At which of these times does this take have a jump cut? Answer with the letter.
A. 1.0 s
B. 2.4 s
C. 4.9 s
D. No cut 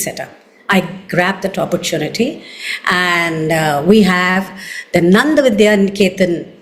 D